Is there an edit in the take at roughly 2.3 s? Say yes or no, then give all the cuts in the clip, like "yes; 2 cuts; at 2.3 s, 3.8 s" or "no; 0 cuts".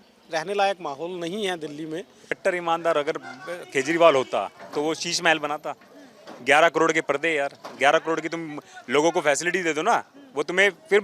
yes; 1 cut; at 2.3 s